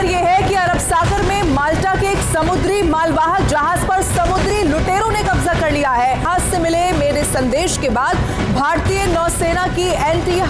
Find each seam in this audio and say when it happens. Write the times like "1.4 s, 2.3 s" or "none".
none